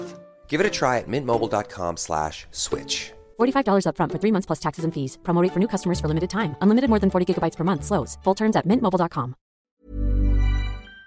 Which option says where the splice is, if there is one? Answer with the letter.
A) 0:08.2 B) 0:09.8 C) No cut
B